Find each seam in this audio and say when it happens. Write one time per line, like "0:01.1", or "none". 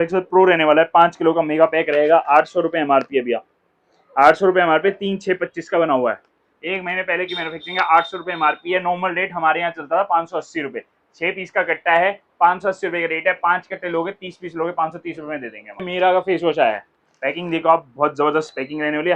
0:15.8